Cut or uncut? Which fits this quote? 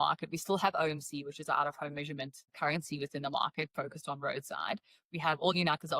cut